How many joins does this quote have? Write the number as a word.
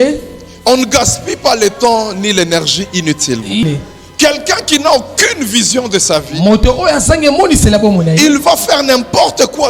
one